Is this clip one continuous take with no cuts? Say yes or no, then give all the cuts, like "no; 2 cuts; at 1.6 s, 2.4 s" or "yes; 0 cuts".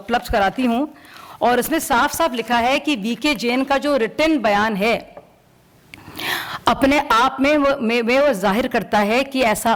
yes; 0 cuts